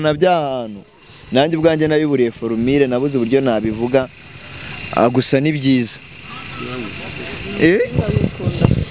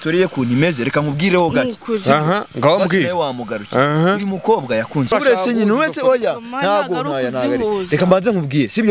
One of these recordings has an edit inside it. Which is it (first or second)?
second